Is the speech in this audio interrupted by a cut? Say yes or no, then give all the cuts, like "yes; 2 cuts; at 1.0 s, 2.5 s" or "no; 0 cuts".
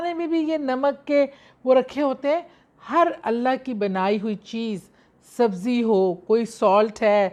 no; 0 cuts